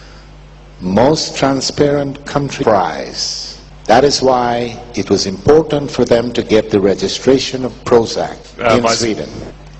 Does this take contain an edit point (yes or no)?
no